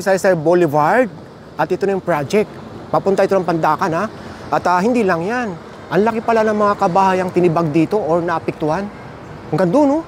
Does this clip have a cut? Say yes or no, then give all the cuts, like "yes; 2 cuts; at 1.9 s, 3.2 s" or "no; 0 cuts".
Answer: no; 0 cuts